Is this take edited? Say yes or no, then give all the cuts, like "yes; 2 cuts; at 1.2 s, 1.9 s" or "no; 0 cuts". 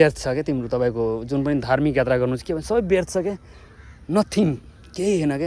no; 0 cuts